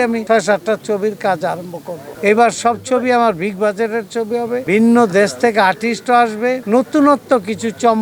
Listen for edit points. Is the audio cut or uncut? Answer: uncut